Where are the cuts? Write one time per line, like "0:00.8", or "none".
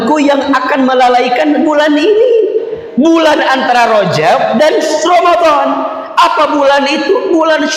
none